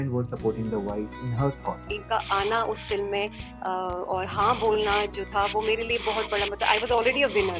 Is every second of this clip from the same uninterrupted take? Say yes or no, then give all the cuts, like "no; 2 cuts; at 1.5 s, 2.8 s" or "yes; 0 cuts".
no; 1 cut; at 2.0 s